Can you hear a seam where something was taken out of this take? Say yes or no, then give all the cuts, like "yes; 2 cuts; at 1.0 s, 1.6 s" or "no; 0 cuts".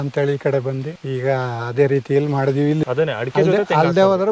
yes; 2 cuts; at 0.9 s, 2.8 s